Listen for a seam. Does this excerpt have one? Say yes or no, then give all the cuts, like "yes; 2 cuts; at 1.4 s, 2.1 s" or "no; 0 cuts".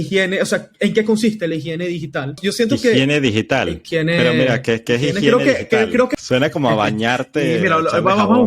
yes; 3 cuts; at 2.4 s, 3.8 s, 6.1 s